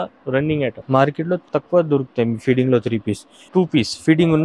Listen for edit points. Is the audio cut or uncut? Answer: cut